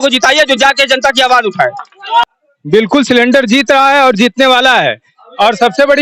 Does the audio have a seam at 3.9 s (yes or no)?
no